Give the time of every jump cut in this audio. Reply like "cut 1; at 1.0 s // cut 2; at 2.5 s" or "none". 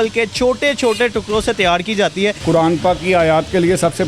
cut 1; at 2.4 s